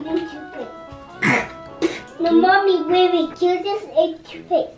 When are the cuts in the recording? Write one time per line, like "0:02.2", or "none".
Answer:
0:01.0
0:02.0
0:03.3